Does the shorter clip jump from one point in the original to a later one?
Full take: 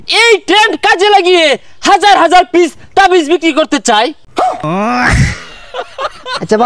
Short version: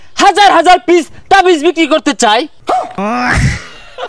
yes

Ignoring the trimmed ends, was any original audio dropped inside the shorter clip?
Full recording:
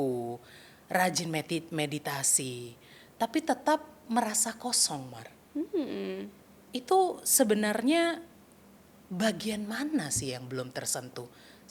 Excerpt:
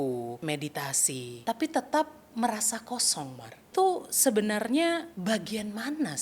yes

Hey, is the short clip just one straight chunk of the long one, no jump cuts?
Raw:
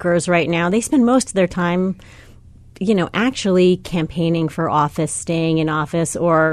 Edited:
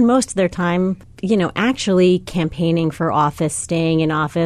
no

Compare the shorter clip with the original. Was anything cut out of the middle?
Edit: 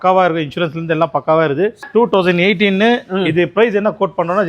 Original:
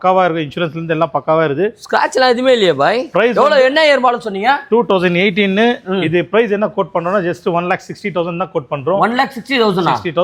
yes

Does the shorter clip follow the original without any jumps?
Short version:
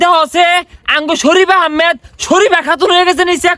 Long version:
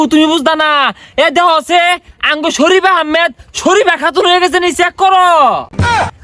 yes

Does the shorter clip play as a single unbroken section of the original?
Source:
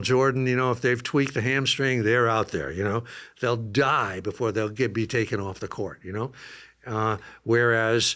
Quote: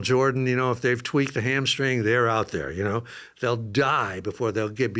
yes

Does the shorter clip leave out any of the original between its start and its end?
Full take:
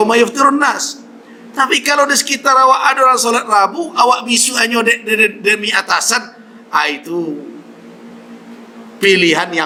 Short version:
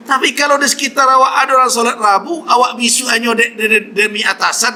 no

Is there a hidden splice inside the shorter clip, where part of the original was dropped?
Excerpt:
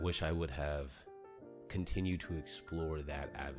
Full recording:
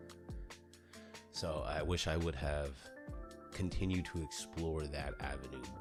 no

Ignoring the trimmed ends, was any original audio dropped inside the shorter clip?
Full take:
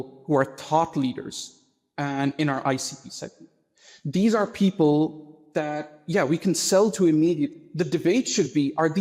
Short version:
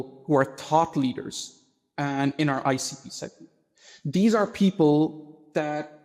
no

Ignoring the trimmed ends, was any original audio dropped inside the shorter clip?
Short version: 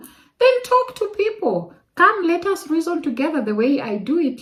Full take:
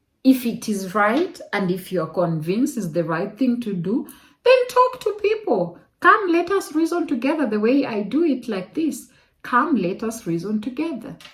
no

